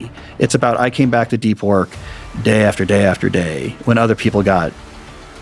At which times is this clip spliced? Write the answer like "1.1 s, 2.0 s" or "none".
none